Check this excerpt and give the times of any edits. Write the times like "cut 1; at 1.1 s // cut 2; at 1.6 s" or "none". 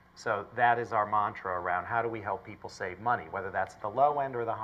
none